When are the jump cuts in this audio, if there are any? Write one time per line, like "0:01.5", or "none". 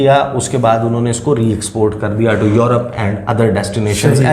none